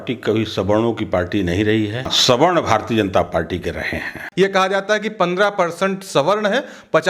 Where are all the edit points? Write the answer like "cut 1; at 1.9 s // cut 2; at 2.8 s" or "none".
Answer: cut 1; at 2.1 s // cut 2; at 4.2 s